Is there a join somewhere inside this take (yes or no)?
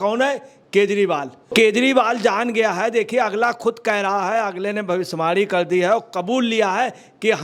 yes